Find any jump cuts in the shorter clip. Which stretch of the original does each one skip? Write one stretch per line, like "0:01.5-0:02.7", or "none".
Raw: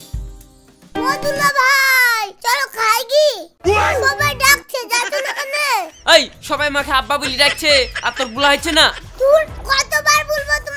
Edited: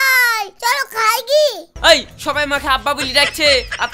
0:03.5-0:05.9